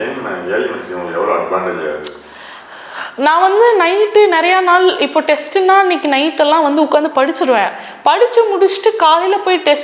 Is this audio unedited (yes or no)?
yes